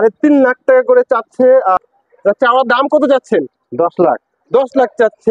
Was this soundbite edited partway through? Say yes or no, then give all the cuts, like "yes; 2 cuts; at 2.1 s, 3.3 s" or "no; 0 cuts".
yes; 1 cut; at 1.8 s